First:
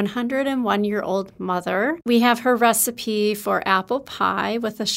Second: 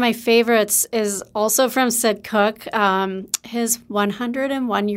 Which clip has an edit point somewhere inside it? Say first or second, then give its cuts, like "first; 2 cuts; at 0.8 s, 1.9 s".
first; 1 cut; at 2.0 s